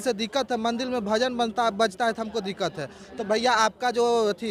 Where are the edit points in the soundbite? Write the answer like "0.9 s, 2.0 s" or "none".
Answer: none